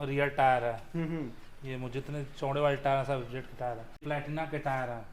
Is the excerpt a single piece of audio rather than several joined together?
no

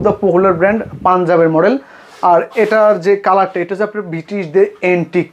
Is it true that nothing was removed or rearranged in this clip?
yes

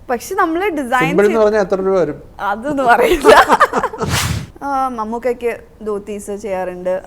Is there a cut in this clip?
yes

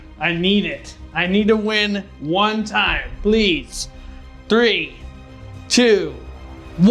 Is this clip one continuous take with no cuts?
yes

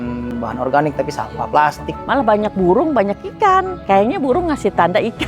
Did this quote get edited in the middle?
yes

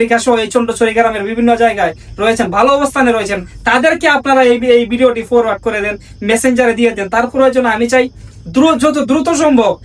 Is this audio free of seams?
yes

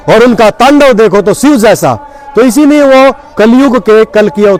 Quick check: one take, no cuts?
yes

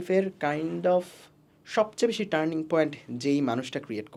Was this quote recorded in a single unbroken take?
yes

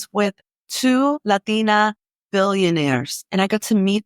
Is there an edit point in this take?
yes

